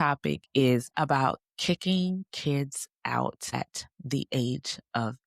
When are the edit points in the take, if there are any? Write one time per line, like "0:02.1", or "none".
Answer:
0:00.9
0:03.5

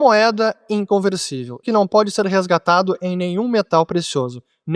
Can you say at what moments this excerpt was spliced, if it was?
0:01.6

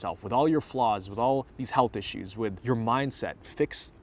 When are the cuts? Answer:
0:01.6
0:02.6

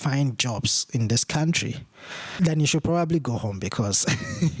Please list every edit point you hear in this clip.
none

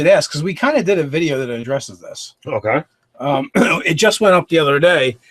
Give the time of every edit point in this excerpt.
0:02.3

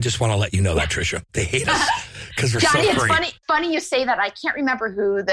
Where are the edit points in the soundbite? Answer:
0:01.2
0:03.4

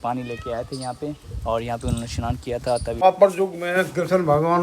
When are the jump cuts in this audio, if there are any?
0:03.0

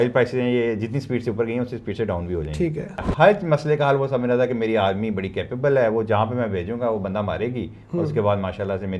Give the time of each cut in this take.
0:03.0

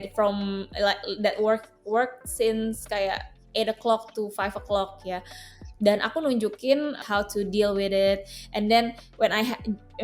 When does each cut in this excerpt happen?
0:07.0

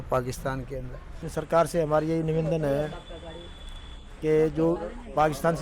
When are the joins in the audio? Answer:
0:01.2

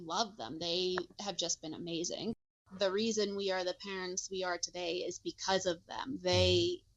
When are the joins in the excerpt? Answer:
0:02.4

